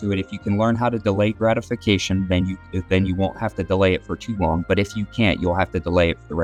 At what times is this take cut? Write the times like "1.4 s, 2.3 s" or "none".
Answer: none